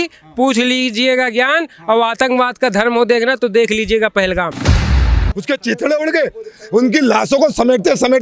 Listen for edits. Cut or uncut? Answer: cut